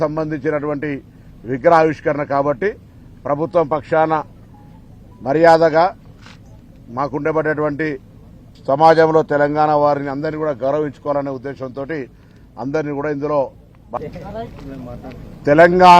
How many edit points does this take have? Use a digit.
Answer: 1